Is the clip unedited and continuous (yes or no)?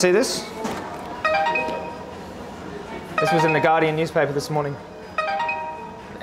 yes